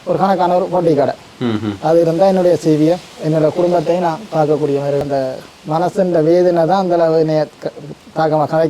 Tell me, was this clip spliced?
yes; 1 cut; at 5.0 s

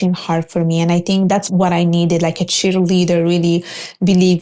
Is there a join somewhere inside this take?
yes; 1 cut; at 1.3 s

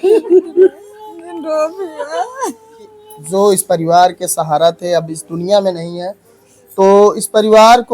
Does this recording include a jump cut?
yes; 1 cut; at 3.3 s

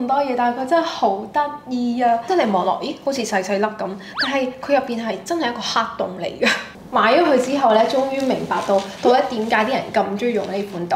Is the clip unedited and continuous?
no; 2 cuts; at 2.3 s, 6.7 s

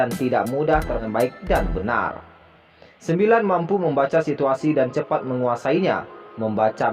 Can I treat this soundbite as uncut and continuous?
no; 1 cut; at 1.0 s

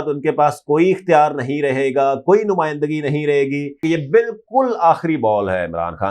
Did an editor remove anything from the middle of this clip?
yes; 1 cut; at 3.8 s

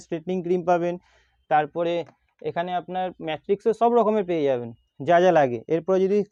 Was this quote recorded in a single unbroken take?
yes; 0 cuts

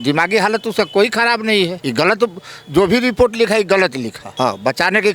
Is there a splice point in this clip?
yes; 2 cuts; at 1.8 s, 4.2 s

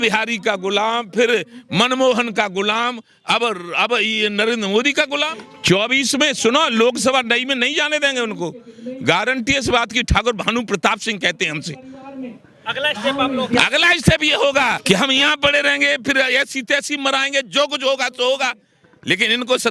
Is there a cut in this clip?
yes; 2 cuts; at 5.5 s, 14.8 s

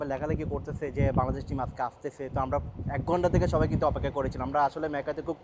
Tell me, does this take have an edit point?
no; 0 cuts

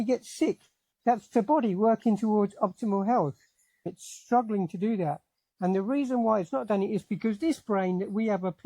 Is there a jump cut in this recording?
yes; 1 cut; at 3.9 s

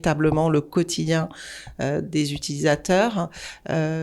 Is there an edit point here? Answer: no; 0 cuts

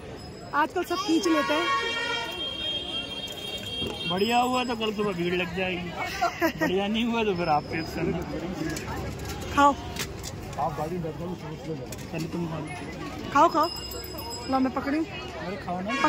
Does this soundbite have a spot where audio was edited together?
no; 0 cuts

